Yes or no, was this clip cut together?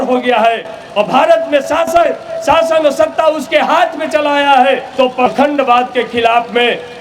yes